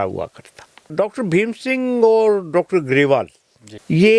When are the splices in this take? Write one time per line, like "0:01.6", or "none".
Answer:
0:00.9